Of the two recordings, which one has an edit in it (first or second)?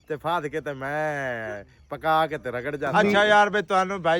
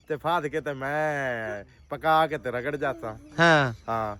first